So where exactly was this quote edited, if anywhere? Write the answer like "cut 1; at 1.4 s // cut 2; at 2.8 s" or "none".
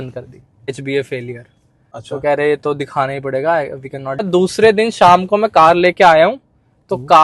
cut 1; at 0.7 s // cut 2; at 4.3 s